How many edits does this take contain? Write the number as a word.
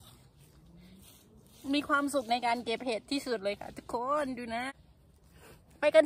one